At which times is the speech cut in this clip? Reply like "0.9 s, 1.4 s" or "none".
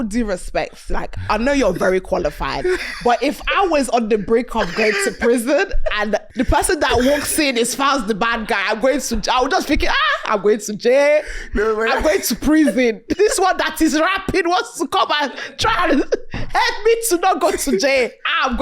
6.3 s, 13.1 s